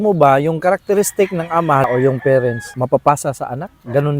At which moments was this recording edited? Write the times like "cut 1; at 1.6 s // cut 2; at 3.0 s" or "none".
cut 1; at 1.9 s // cut 2; at 2.7 s